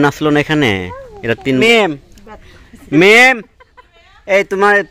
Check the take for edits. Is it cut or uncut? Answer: cut